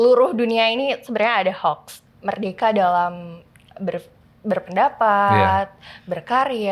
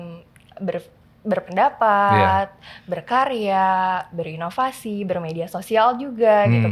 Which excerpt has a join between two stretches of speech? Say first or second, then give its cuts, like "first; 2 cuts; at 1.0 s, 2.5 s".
first; 1 cut; at 1.9 s